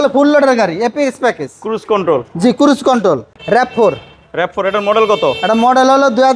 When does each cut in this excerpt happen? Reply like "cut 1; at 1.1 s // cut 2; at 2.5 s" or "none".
cut 1; at 3.3 s